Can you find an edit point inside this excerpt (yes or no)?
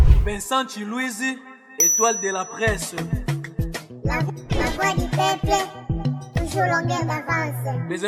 no